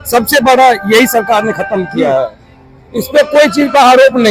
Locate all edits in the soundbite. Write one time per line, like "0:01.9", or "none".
none